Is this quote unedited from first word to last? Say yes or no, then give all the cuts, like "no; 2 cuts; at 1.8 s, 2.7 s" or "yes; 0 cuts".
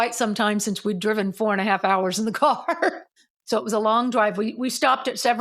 no; 1 cut; at 3.1 s